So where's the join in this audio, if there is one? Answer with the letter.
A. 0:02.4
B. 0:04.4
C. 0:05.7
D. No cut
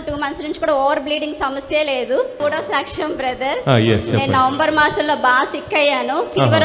A